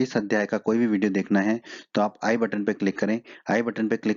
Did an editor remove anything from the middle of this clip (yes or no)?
yes